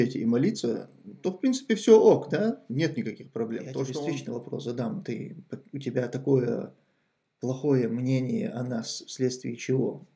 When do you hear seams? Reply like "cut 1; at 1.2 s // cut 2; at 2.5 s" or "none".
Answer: cut 1; at 4.0 s